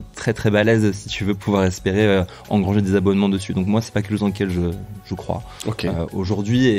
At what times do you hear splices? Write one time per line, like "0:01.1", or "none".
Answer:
none